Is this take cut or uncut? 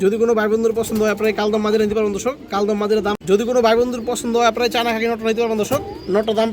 cut